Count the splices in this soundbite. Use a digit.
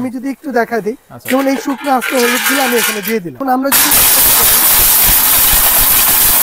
1